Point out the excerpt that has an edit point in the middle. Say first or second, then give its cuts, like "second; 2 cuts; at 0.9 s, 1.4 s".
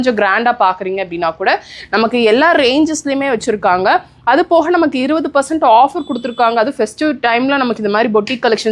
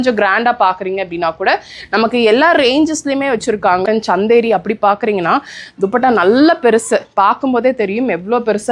second; 1 cut; at 3.8 s